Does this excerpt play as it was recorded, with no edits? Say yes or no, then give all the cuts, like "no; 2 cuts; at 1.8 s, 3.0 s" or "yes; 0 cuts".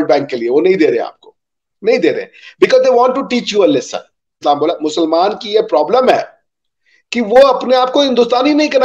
no; 1 cut; at 4.4 s